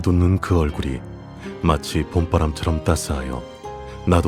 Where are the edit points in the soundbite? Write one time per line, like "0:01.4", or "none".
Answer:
none